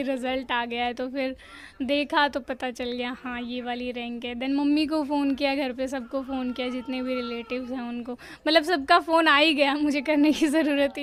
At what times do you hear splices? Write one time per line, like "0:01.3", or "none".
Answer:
none